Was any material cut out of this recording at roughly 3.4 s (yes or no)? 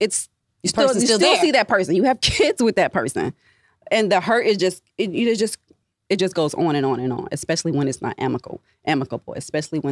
no